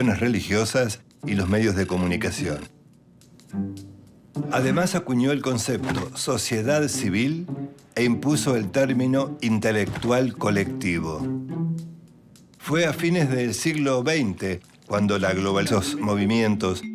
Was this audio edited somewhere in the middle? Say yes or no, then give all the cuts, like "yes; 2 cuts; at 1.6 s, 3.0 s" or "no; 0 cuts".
no; 0 cuts